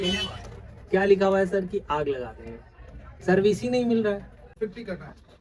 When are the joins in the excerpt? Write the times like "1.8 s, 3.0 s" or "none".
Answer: 4.5 s